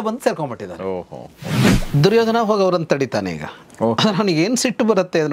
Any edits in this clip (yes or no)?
yes